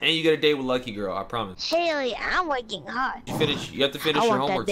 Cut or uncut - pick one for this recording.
cut